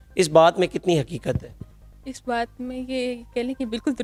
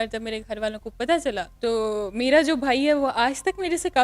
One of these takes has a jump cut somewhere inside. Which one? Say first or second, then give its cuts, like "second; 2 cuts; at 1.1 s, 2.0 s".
second; 1 cut; at 1.5 s